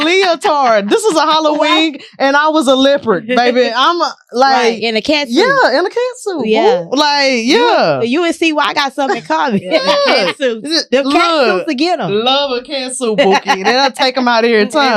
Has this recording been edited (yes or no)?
no